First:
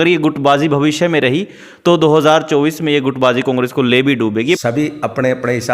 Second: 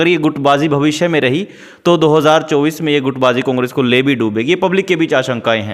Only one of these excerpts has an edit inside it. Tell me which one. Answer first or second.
first